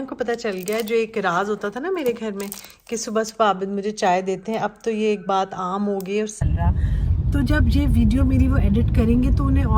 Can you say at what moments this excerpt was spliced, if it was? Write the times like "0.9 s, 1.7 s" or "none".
6.3 s